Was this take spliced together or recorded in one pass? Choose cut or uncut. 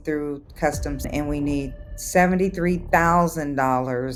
uncut